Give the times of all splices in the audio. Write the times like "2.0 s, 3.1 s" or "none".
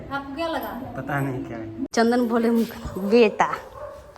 1.9 s